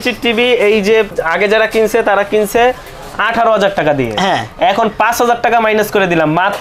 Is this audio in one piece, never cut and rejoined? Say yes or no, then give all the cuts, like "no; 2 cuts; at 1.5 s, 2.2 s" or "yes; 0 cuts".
no; 1 cut; at 1.2 s